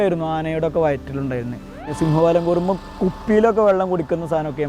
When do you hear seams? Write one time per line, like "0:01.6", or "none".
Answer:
0:01.9